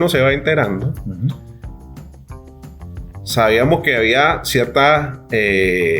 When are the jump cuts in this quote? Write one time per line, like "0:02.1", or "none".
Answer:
none

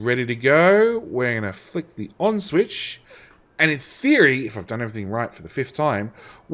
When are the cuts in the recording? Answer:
none

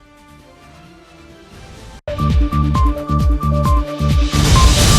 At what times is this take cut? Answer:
0:02.0

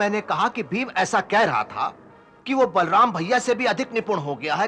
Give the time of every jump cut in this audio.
none

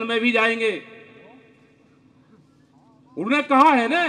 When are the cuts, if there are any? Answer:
none

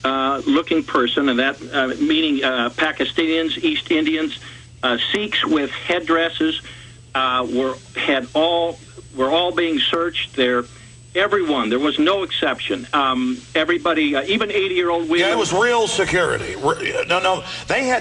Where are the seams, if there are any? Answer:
0:11.3

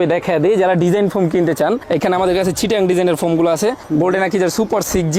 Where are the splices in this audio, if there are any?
none

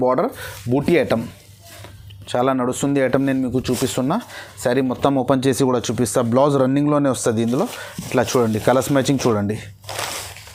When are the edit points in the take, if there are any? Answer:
none

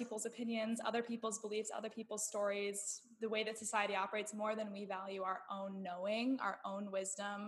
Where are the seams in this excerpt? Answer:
none

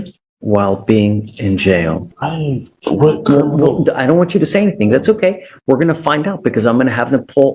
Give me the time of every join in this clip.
0:02.0

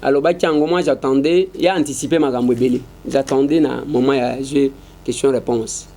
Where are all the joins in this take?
none

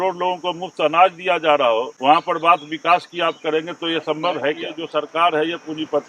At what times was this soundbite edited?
0:01.9
0:04.7

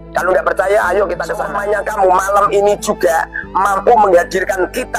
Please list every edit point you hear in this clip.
0:01.4

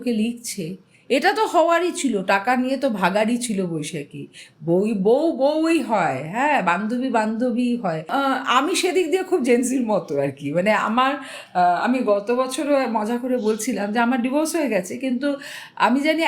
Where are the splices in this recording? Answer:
0:08.0

